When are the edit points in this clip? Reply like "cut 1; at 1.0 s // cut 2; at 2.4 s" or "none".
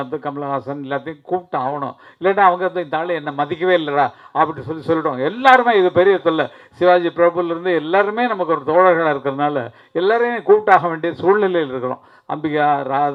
none